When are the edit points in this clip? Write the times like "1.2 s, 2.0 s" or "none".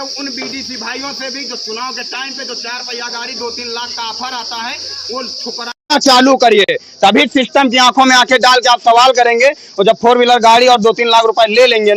none